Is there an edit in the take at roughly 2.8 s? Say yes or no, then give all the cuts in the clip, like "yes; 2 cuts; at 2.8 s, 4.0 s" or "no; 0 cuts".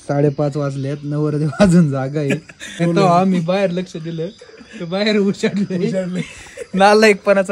yes; 1 cut; at 2.8 s